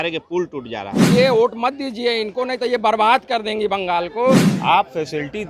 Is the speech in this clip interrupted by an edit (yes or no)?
yes